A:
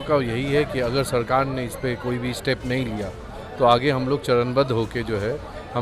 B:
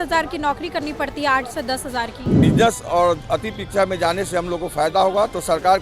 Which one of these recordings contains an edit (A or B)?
B